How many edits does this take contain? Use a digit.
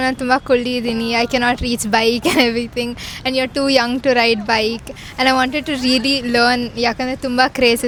0